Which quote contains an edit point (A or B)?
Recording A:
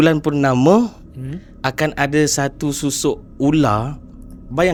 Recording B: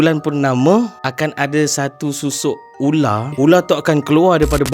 B